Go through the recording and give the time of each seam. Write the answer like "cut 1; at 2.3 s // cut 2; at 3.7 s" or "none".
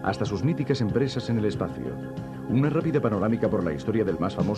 none

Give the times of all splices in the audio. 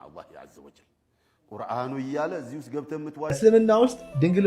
cut 1; at 3.3 s

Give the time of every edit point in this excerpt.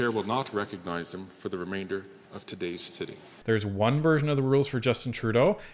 cut 1; at 3.3 s

